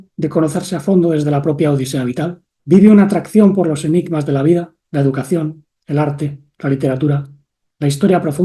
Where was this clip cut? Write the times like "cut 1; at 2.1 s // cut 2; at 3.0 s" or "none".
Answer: cut 1; at 2.5 s